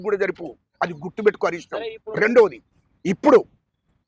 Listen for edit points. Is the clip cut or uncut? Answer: uncut